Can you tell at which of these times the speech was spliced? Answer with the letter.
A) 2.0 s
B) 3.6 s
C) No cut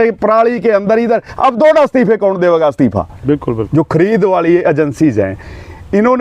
B